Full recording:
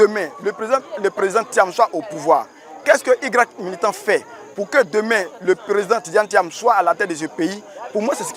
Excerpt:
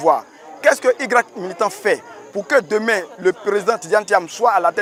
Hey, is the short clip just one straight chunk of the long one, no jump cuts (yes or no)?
yes